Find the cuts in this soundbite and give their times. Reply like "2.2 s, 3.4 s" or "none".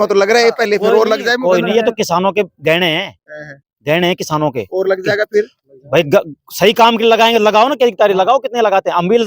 none